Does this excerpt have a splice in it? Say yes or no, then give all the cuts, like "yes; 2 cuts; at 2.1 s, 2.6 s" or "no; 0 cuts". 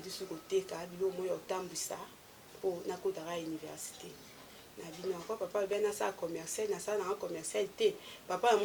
no; 0 cuts